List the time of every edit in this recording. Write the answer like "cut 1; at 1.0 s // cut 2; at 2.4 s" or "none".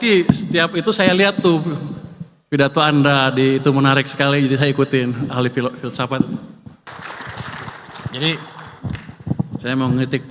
cut 1; at 6.9 s